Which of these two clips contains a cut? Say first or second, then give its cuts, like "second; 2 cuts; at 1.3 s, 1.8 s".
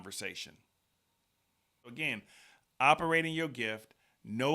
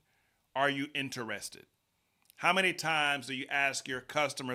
first; 1 cut; at 1.9 s